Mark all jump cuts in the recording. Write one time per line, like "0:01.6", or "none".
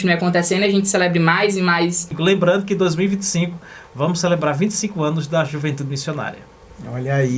0:02.1